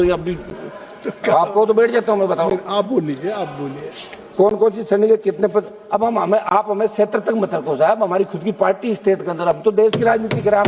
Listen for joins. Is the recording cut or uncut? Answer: uncut